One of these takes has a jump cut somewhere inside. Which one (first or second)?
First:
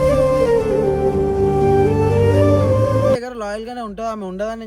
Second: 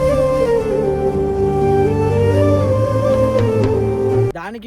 first